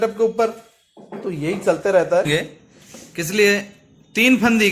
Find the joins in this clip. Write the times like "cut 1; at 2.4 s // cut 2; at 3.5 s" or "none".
cut 1; at 2.3 s